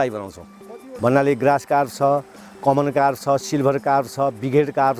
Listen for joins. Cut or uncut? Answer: uncut